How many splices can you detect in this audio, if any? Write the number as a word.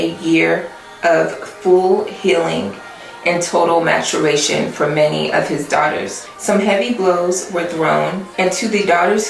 zero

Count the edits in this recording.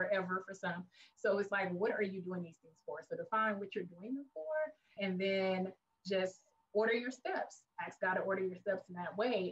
one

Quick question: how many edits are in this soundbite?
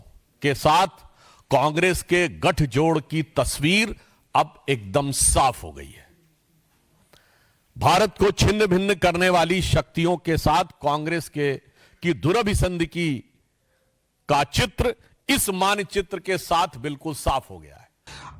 one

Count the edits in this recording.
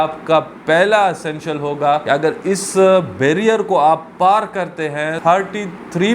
two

